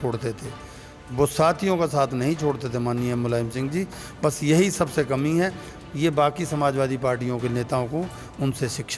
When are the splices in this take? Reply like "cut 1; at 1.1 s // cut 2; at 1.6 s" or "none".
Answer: none